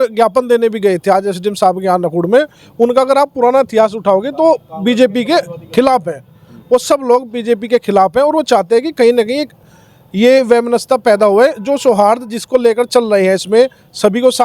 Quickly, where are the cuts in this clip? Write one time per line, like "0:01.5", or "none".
none